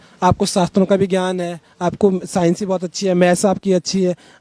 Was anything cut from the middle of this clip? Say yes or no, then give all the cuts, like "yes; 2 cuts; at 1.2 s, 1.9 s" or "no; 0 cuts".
no; 0 cuts